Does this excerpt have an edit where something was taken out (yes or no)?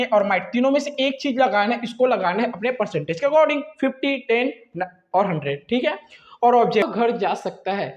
yes